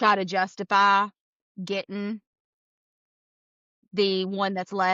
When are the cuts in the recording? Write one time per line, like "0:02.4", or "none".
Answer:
none